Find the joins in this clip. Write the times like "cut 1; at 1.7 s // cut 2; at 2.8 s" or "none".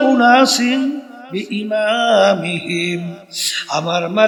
none